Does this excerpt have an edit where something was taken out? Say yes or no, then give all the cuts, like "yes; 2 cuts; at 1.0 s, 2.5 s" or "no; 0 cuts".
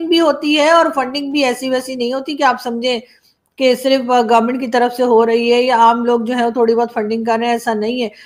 no; 0 cuts